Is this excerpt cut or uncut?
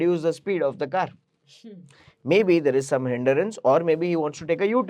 uncut